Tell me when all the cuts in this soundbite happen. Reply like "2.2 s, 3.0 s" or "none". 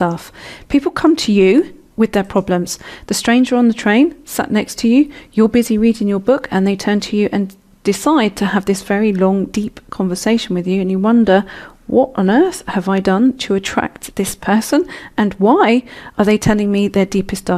14.9 s